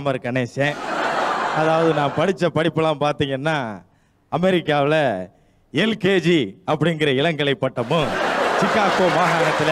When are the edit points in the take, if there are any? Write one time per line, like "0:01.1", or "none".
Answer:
none